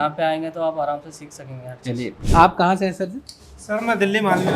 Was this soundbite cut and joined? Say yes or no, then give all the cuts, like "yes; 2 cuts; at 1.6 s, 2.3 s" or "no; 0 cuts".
yes; 1 cut; at 2.2 s